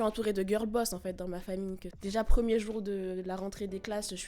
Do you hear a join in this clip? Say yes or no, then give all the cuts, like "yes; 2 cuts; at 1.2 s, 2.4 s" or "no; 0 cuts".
yes; 1 cut; at 1.9 s